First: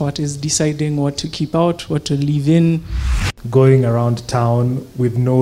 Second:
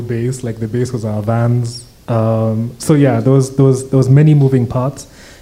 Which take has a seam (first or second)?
first